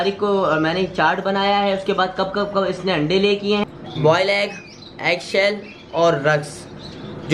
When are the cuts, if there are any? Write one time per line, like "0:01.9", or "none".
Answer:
0:03.6